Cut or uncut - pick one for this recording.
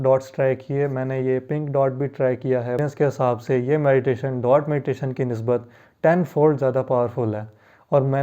cut